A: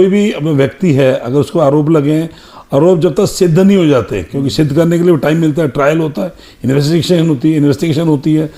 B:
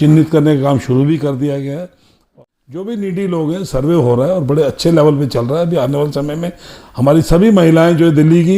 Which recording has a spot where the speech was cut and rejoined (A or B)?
B